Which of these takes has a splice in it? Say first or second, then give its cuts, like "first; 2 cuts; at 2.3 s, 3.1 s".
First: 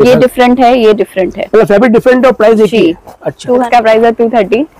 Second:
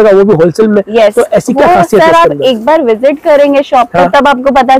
first; 1 cut; at 3.5 s